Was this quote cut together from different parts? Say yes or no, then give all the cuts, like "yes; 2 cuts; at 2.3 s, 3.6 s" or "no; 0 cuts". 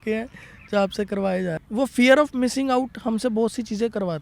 yes; 1 cut; at 1.6 s